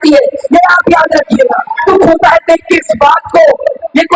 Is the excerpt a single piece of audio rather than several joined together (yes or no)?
no